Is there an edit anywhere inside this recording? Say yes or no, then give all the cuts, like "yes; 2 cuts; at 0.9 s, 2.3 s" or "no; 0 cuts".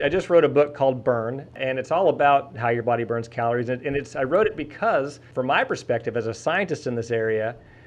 yes; 2 cuts; at 1.5 s, 5.2 s